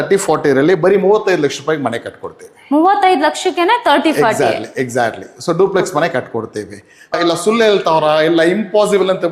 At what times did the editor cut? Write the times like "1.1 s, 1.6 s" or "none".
7.2 s